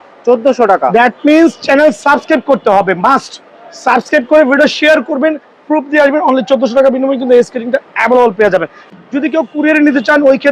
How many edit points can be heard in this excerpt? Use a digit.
1